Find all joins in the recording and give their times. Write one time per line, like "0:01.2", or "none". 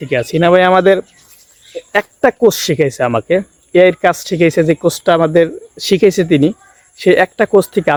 none